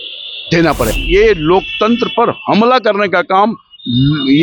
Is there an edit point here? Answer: yes; 1 cut; at 0.9 s

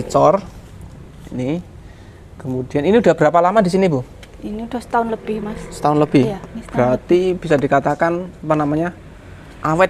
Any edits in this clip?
no; 0 cuts

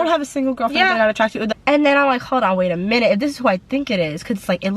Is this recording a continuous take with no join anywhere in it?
no; 1 cut; at 1.5 s

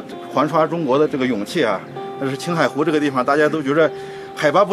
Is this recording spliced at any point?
yes; 1 cut; at 1.1 s

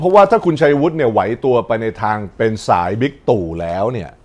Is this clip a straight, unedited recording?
no; 1 cut; at 2.3 s

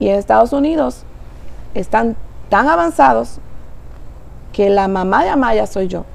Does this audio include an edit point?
no; 0 cuts

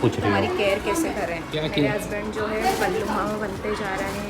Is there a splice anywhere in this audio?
yes; 1 cut; at 1.6 s

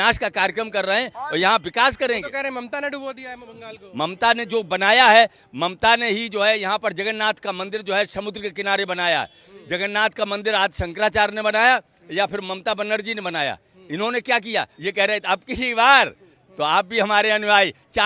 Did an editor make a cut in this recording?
yes; 1 cut; at 14.7 s

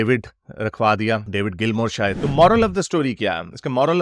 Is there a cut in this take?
yes; 1 cut; at 2.2 s

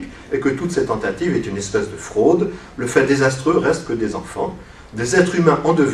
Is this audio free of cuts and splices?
no; 1 cut; at 1.8 s

